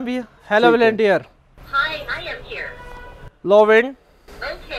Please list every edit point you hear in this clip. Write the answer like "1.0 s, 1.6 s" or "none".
none

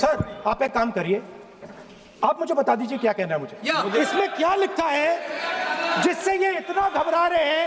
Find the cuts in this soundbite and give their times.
3.9 s

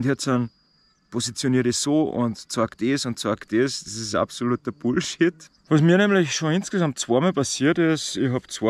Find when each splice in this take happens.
5.5 s

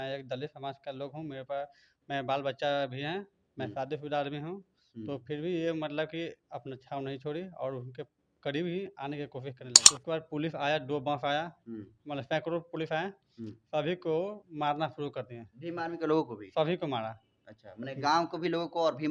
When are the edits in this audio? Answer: 9.9 s

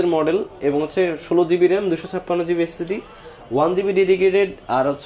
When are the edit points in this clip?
none

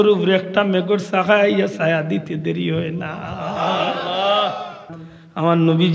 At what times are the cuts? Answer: 4.9 s

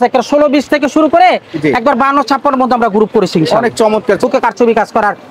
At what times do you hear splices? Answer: 4.2 s

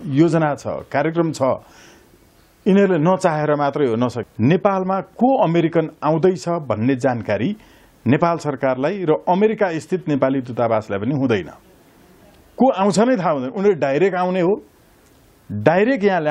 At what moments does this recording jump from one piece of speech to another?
4.2 s

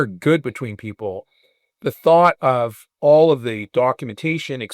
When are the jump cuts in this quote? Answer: 2.8 s

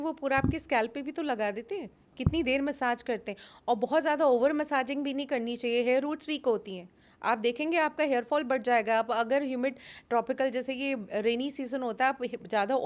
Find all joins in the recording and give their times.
none

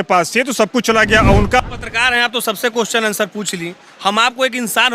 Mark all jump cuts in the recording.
1.6 s

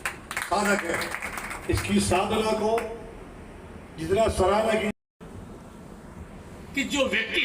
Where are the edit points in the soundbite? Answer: 5.1 s

